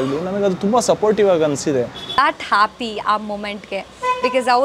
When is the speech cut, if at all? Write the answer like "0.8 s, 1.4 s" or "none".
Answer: 2.1 s